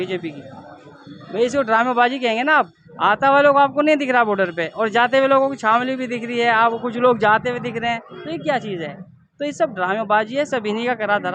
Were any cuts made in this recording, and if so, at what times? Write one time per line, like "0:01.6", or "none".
none